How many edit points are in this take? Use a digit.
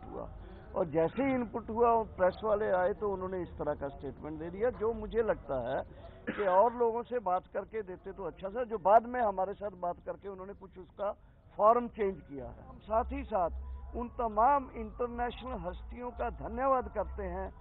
1